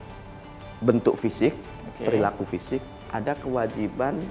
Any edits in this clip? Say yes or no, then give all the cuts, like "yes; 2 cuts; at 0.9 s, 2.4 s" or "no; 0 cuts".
no; 0 cuts